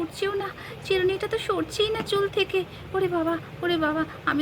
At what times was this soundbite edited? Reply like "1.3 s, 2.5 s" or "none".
none